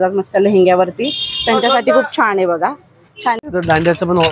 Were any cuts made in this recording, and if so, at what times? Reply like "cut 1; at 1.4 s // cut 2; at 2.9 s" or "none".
cut 1; at 3.4 s